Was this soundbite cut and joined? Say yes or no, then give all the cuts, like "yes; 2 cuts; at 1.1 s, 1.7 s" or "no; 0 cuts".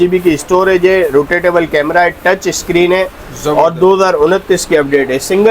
no; 0 cuts